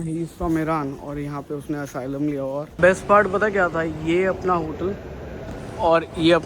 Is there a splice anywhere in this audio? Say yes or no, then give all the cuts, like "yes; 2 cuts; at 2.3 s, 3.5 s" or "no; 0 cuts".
yes; 1 cut; at 2.7 s